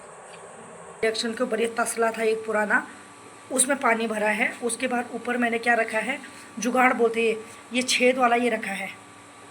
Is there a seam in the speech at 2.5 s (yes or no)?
no